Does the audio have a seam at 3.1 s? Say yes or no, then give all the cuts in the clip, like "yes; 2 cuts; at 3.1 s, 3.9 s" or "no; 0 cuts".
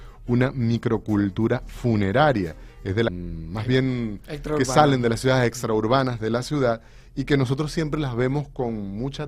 no; 0 cuts